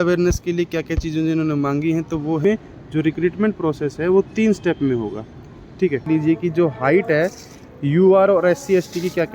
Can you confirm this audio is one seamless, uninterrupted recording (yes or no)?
no